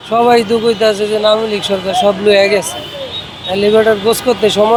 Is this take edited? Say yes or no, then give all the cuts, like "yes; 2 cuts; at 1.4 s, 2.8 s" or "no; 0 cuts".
no; 0 cuts